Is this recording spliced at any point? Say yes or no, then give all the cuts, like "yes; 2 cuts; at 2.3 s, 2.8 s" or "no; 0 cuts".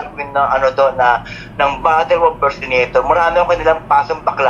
no; 0 cuts